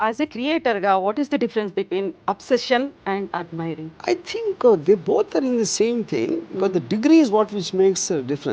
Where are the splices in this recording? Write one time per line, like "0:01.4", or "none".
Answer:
0:04.0